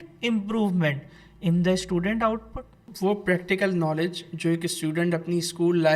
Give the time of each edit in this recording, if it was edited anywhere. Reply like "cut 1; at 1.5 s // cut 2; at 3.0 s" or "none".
cut 1; at 2.8 s